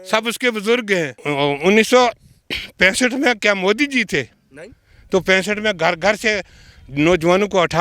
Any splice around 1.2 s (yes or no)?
yes